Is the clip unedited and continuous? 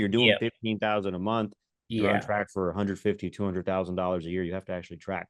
yes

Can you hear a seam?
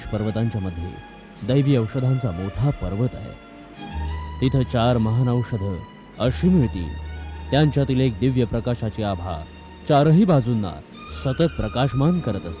no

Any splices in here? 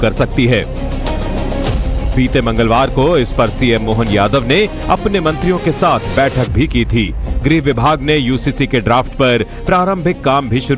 no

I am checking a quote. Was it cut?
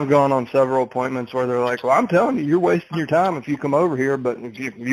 no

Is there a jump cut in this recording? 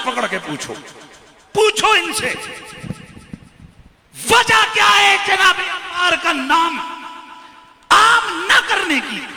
no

